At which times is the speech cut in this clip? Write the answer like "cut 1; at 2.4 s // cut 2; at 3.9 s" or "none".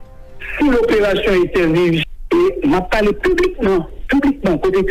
cut 1; at 2.1 s

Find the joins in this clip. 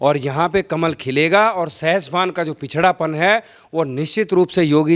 none

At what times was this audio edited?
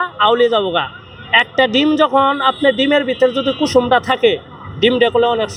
none

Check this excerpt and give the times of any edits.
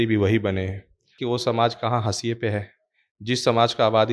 cut 1; at 1.1 s

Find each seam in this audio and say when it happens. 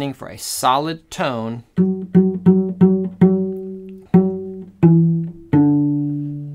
cut 1; at 3.9 s

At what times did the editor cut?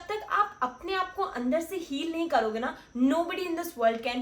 none

